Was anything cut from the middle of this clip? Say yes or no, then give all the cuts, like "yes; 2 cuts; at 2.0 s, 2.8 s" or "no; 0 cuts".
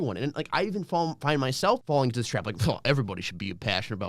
yes; 1 cut; at 1.8 s